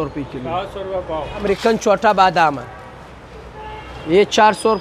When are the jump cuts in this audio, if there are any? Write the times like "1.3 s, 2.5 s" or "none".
1.4 s